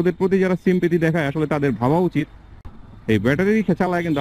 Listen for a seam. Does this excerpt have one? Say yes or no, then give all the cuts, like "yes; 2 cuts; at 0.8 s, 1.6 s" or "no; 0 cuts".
no; 0 cuts